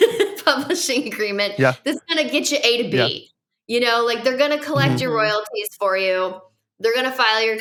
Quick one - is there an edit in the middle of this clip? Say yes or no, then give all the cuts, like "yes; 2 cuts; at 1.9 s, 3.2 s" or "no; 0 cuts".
no; 0 cuts